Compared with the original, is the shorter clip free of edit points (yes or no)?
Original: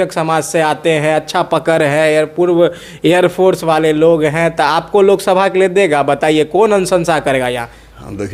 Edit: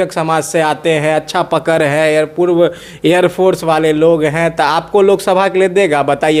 yes